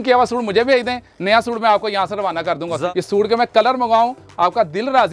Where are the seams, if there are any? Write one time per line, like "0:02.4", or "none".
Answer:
0:02.8